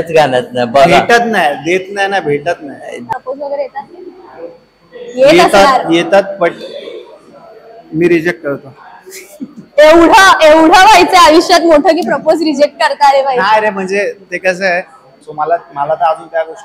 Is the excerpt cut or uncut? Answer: cut